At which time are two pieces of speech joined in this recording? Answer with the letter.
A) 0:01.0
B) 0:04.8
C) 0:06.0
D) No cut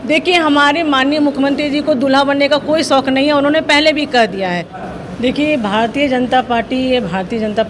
B